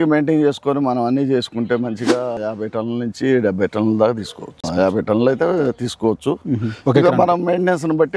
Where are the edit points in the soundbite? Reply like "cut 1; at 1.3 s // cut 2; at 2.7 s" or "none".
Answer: cut 1; at 2.4 s // cut 2; at 4.6 s